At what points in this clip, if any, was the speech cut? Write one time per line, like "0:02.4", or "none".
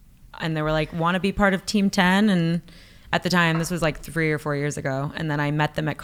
none